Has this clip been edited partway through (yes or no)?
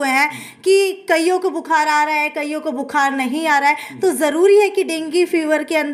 no